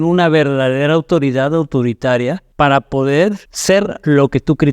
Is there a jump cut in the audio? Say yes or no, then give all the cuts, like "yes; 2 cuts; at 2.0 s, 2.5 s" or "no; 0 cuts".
yes; 2 cuts; at 2.4 s, 3.5 s